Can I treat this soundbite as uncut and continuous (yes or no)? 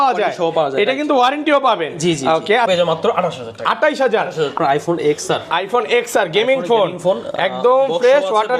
no